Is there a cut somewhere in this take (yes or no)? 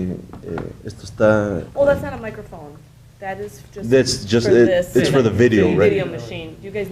yes